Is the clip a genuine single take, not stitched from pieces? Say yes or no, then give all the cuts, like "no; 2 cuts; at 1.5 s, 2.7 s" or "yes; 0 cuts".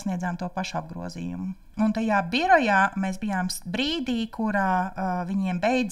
no; 1 cut; at 1.6 s